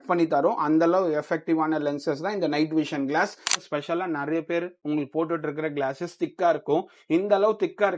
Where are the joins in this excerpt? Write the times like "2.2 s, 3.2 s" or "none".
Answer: 3.6 s